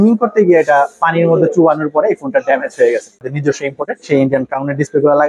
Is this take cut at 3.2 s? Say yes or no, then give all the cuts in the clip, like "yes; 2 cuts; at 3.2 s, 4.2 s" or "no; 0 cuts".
yes; 1 cut; at 3.2 s